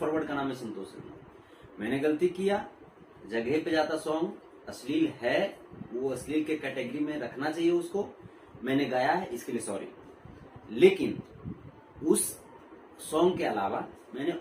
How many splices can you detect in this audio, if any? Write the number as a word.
zero